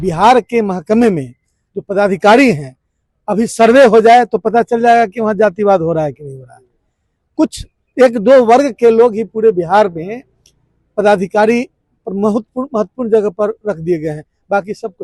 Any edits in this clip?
no; 0 cuts

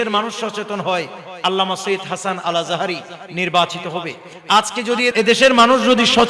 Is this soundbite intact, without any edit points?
no; 1 cut; at 5.1 s

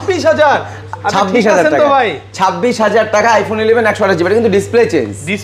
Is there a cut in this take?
no; 0 cuts

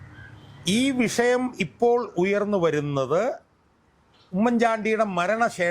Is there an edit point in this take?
no; 0 cuts

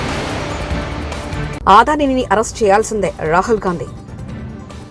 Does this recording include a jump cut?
yes; 1 cut; at 1.5 s

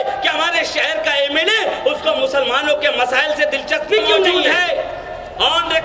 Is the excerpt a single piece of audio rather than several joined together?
no; 1 cut; at 4.3 s

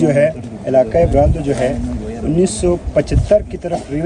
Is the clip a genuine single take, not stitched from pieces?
yes; 0 cuts

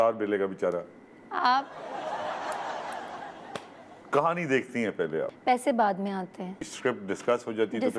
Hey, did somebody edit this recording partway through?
yes; 3 cuts; at 3.9 s, 5.3 s, 6.5 s

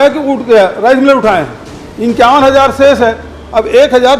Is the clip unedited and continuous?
yes; 0 cuts

